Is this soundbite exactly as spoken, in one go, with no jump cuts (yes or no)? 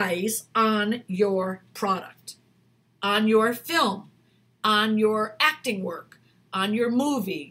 yes